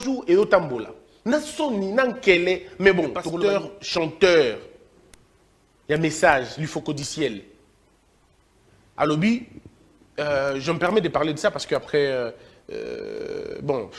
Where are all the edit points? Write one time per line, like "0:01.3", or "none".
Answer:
0:03.2